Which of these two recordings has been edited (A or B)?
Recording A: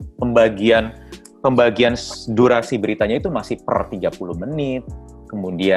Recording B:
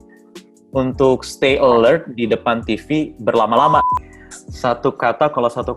B